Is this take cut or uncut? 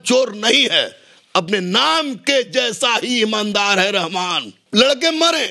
cut